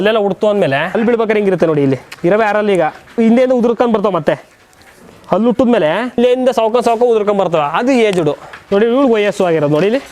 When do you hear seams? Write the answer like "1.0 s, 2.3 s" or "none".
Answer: 0.9 s, 2.1 s, 3.1 s, 6.2 s, 8.5 s